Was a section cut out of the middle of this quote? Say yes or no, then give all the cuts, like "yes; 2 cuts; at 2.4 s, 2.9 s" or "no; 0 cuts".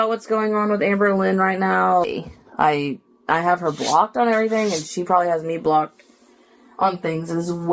yes; 1 cut; at 2.0 s